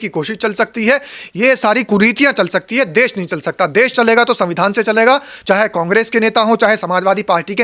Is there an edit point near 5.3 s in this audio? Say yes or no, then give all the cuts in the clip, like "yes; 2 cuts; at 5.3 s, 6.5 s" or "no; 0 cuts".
yes; 1 cut; at 5.3 s